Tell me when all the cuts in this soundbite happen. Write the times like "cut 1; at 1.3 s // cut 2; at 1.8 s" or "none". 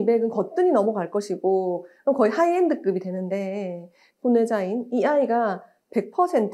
cut 1; at 4.0 s

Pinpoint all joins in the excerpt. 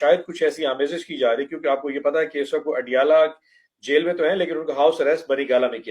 none

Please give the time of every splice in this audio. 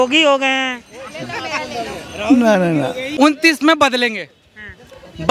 cut 1; at 3.0 s

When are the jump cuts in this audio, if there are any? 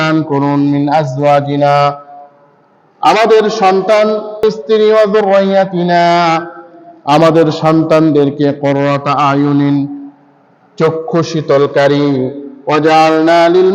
cut 1; at 4.4 s

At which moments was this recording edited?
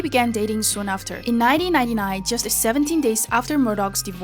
cut 1; at 1.5 s

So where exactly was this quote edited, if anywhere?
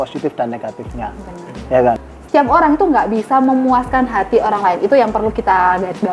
cut 1; at 2.1 s

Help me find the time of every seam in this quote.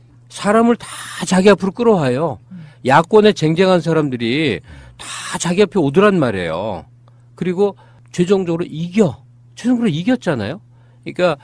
none

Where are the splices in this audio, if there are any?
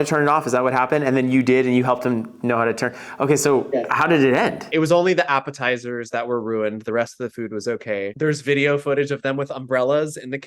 cut 1; at 4.7 s // cut 2; at 8.1 s

